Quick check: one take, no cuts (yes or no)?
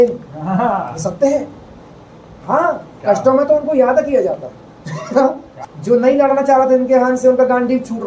no